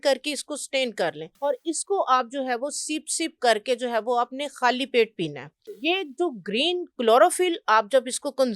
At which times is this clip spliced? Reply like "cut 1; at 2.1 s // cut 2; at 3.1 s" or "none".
cut 1; at 1.3 s // cut 2; at 5.7 s